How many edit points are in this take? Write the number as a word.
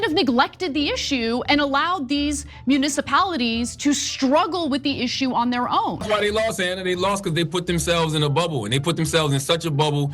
one